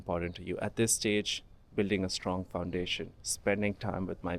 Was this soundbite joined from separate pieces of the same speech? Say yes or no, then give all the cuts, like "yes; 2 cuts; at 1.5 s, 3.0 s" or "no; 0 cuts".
no; 0 cuts